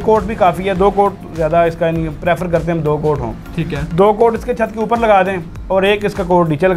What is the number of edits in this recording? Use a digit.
0